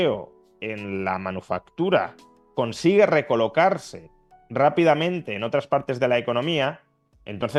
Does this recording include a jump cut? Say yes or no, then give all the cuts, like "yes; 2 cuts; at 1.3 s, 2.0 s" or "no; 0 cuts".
no; 0 cuts